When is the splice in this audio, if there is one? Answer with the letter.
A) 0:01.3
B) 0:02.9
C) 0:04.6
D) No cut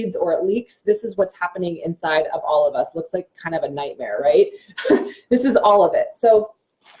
D